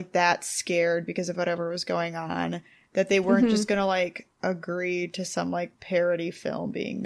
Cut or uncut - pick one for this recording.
cut